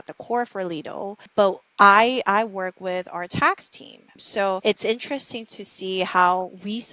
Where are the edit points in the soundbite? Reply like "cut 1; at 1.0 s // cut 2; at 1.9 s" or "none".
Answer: cut 1; at 4.6 s